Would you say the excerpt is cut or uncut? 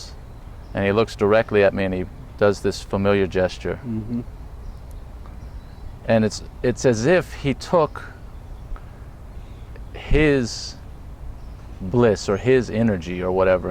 uncut